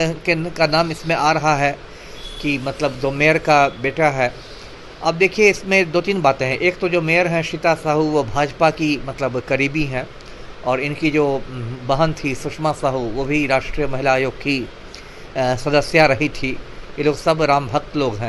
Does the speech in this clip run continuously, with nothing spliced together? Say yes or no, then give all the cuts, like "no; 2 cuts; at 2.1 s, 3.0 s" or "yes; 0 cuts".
yes; 0 cuts